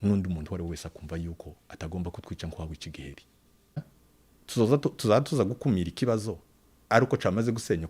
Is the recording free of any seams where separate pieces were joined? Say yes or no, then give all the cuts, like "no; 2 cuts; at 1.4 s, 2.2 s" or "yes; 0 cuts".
no; 1 cut; at 3.8 s